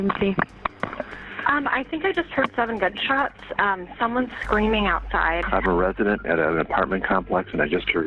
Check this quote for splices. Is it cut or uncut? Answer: uncut